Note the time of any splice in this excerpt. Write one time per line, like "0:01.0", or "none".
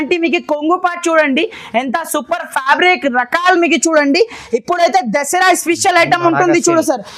none